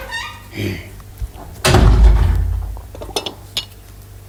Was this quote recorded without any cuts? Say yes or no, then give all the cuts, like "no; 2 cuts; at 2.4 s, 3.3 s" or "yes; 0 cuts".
yes; 0 cuts